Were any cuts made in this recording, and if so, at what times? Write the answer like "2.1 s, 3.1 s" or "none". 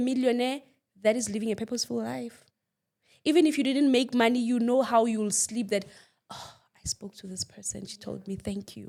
none